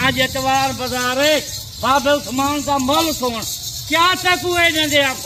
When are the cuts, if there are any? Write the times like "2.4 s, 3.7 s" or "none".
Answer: none